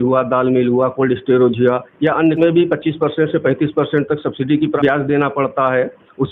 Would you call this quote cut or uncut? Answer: cut